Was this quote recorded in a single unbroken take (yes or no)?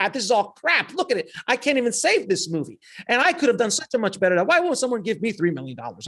yes